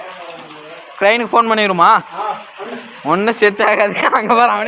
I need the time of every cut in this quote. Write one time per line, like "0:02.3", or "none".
none